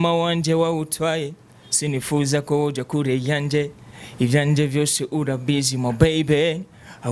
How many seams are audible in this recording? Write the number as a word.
zero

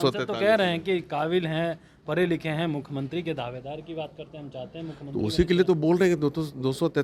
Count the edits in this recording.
zero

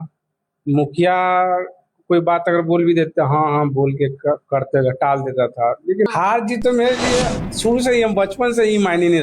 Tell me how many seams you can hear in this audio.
one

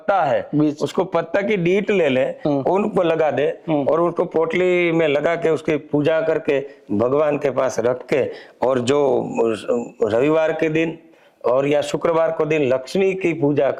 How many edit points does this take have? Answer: zero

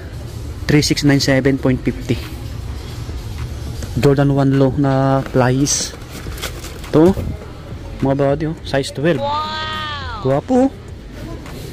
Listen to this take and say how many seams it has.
zero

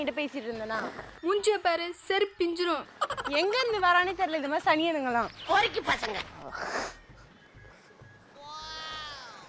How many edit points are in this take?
zero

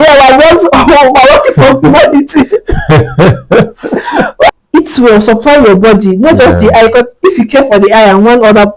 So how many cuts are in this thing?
one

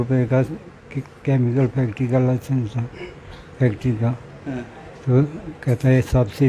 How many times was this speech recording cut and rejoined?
zero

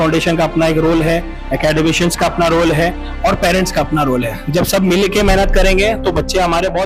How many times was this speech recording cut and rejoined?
zero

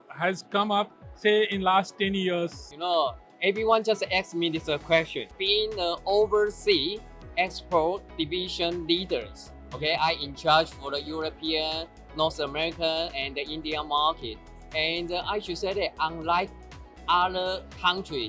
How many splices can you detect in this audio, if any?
two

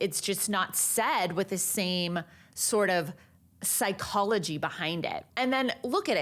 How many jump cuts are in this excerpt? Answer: one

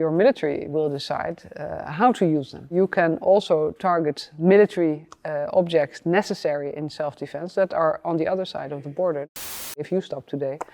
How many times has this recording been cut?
two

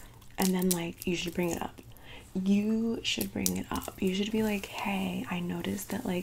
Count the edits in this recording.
zero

